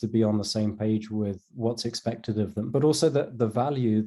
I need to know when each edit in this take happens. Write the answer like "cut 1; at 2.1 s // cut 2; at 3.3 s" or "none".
cut 1; at 2.7 s